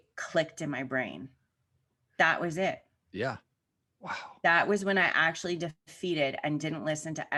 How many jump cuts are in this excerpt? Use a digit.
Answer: 0